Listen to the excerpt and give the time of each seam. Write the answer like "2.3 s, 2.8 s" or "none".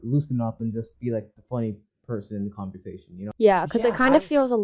3.2 s